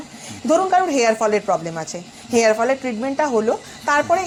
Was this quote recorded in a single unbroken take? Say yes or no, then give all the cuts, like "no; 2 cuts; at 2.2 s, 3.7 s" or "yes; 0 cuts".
yes; 0 cuts